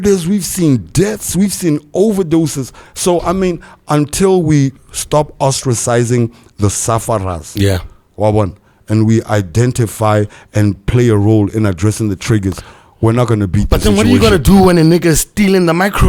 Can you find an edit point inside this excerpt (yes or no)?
no